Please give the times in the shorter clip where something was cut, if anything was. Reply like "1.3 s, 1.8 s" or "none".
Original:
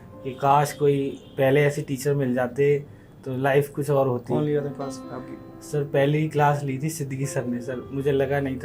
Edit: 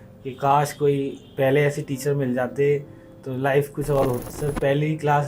4.2 s